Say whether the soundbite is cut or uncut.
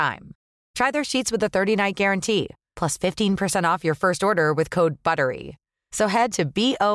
uncut